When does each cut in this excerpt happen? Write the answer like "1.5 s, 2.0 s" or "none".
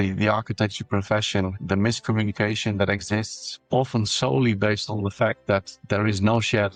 none